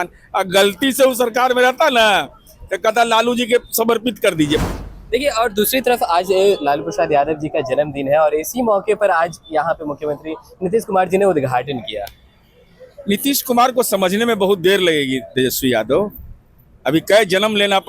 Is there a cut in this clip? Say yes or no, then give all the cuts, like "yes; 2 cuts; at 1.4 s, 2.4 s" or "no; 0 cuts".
yes; 1 cut; at 4.6 s